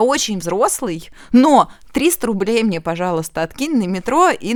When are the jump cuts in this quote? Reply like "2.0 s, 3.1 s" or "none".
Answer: none